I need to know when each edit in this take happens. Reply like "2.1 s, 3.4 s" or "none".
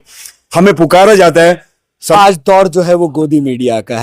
2.0 s